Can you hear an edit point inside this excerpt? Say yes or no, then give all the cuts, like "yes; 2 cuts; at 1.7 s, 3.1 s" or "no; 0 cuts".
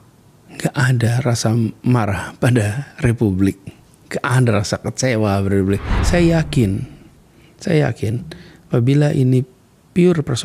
yes; 1 cut; at 6.0 s